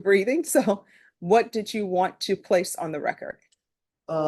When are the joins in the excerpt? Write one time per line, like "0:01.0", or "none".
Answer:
none